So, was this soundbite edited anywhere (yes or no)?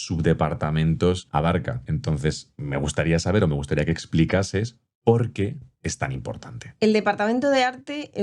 no